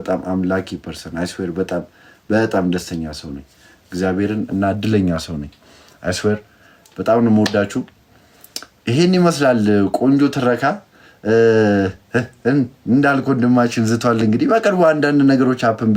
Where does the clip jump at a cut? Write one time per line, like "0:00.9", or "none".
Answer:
none